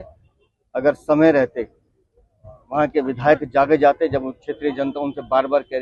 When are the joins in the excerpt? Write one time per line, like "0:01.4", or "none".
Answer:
none